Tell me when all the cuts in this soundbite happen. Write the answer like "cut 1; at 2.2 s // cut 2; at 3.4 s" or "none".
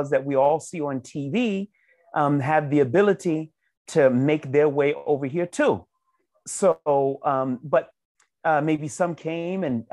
none